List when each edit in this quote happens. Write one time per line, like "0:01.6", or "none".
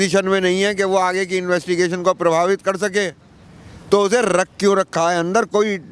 none